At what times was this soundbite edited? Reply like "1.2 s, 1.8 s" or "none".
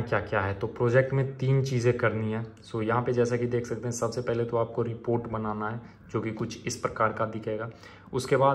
none